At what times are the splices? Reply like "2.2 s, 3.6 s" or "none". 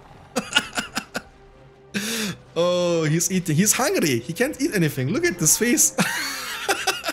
none